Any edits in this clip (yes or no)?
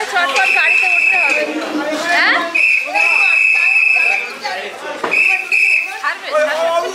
no